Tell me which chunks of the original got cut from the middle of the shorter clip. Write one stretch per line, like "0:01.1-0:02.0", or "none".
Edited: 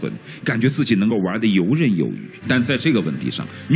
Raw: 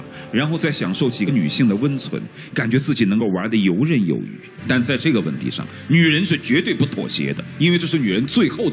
0:04.4-0:04.5